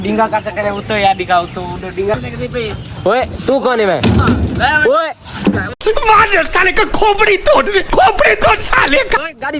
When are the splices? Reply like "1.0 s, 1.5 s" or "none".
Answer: 2.2 s, 5.7 s